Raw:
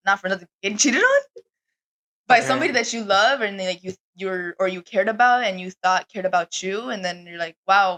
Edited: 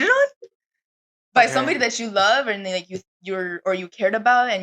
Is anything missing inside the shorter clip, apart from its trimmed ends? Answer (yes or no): no